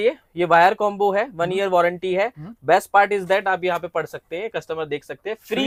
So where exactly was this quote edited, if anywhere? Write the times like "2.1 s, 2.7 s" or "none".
none